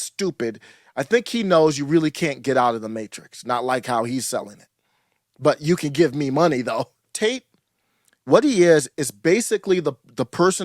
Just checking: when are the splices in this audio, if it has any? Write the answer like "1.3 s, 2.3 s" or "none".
7.1 s